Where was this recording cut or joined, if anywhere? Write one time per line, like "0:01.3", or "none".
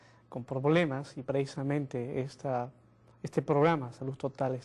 0:03.3